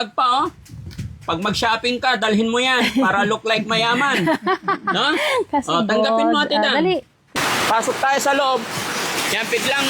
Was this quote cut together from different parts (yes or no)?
yes